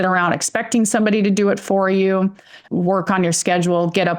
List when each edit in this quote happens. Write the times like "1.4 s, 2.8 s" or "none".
2.6 s